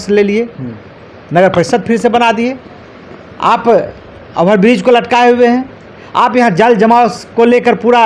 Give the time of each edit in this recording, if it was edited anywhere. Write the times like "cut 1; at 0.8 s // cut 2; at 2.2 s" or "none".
none